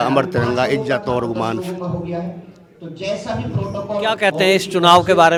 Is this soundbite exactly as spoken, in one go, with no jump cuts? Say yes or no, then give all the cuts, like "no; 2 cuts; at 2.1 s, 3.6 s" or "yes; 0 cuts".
yes; 0 cuts